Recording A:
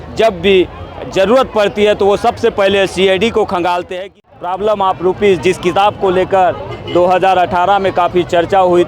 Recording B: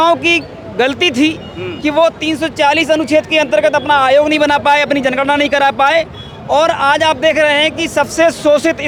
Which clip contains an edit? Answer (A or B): A